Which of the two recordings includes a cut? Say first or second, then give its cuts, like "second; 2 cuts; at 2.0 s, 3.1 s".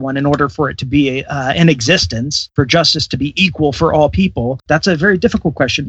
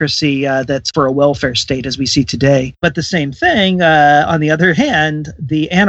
second; 2 cuts; at 0.9 s, 2.8 s